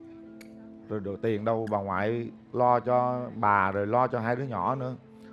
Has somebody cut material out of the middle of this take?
no; 0 cuts

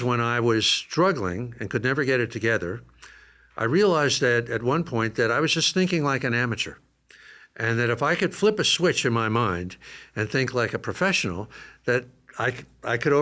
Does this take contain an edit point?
no; 0 cuts

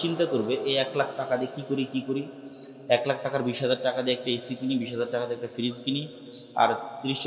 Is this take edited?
no; 0 cuts

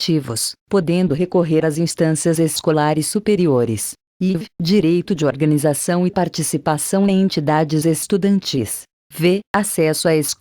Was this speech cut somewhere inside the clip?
no; 0 cuts

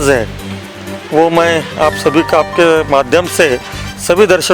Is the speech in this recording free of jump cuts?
yes; 0 cuts

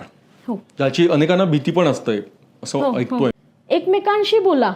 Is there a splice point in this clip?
yes; 1 cut; at 3.4 s

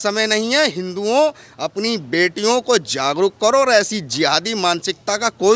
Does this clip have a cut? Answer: no; 0 cuts

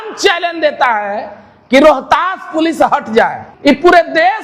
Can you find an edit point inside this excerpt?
yes; 1 cut; at 3.5 s

